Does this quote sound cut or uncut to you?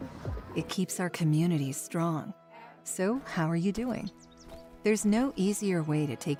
uncut